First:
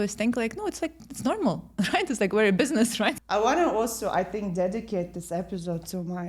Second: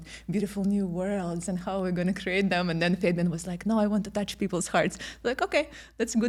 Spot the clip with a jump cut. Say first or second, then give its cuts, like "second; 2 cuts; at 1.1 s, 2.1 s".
first; 1 cut; at 3.2 s